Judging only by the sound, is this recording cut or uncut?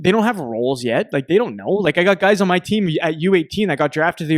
uncut